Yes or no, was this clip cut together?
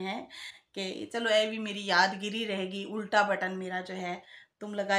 no